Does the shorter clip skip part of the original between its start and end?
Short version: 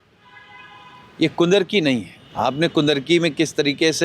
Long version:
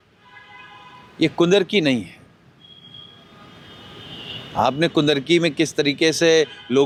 yes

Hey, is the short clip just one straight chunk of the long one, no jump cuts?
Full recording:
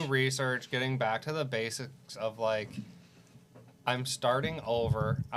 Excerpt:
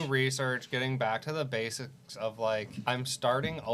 no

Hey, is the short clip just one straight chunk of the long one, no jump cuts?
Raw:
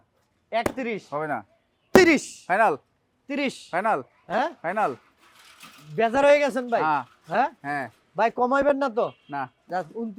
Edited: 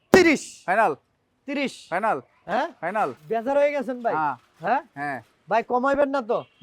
no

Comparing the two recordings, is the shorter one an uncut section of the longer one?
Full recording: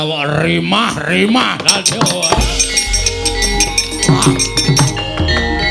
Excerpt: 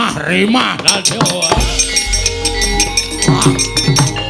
yes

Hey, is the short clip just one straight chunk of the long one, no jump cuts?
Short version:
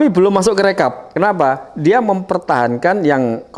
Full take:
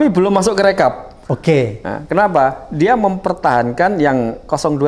no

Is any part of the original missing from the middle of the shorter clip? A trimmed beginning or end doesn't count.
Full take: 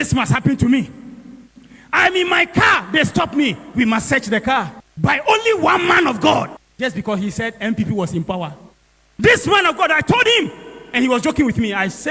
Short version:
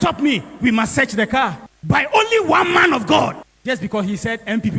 no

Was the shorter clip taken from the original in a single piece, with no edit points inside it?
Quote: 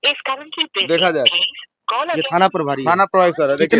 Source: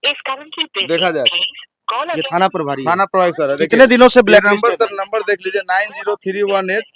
yes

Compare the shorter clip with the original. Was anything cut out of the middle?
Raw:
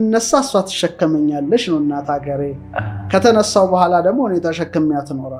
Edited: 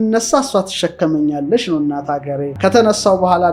yes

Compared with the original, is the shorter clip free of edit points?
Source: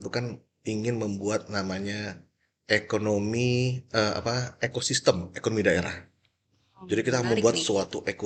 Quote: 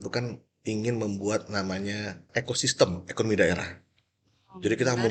no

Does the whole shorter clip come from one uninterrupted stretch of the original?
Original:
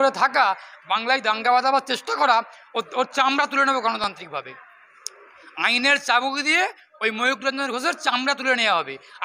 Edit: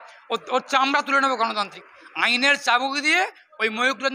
no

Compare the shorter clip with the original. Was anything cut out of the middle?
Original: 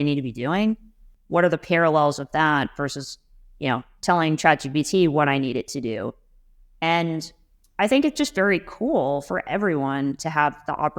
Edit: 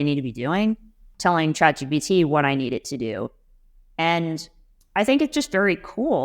yes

